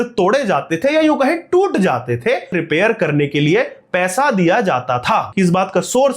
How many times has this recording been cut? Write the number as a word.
two